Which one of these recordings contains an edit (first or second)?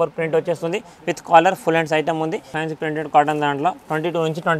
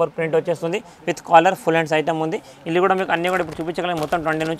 first